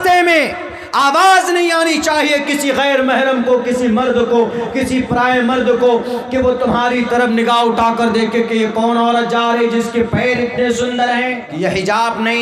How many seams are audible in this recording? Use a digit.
1